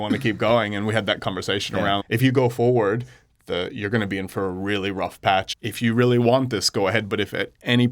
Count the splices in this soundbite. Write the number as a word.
two